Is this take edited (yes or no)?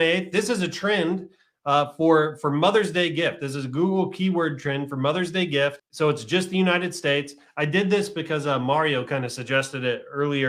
yes